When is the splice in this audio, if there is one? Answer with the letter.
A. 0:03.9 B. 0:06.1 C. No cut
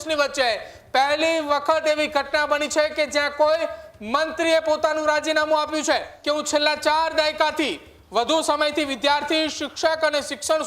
B